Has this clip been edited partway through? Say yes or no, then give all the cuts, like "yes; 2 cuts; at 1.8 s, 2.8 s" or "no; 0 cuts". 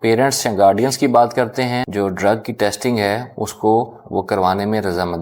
yes; 1 cut; at 1.9 s